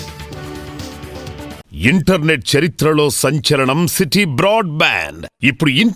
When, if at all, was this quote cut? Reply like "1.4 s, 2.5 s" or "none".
1.6 s

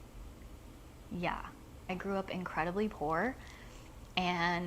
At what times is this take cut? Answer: 1.9 s

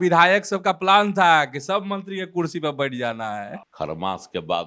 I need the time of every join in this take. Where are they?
3.6 s

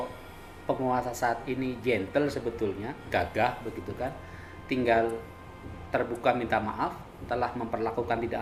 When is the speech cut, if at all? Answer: none

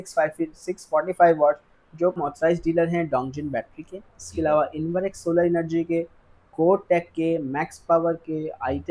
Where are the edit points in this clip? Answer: 2.2 s

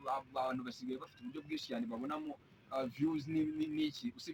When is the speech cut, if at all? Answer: none

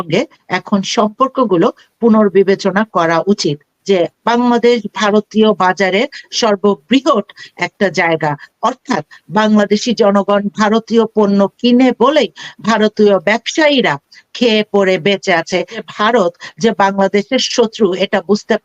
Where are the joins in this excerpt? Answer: 3.7 s, 15.8 s

